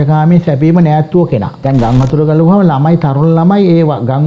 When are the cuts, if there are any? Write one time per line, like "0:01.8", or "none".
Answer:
0:01.5